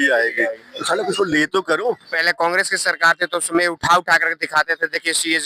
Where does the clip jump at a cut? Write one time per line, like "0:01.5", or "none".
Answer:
none